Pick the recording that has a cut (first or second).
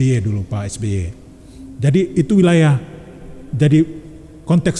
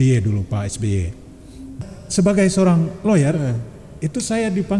second